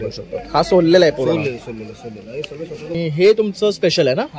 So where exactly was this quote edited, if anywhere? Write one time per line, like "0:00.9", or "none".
0:03.0